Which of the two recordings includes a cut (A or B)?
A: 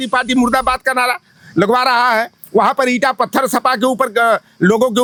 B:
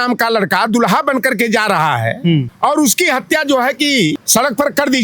B